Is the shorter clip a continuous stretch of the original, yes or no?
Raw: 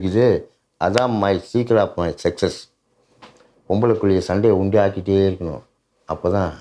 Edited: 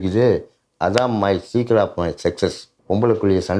no